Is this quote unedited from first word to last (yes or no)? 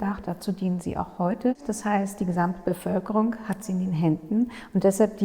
no